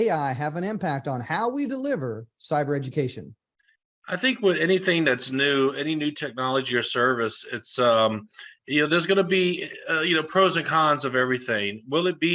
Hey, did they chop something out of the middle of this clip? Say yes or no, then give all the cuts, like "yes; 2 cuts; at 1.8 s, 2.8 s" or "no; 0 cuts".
no; 0 cuts